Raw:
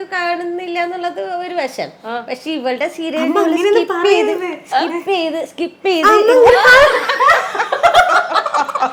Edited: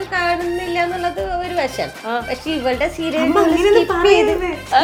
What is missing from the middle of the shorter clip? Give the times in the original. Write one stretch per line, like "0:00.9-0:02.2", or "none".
none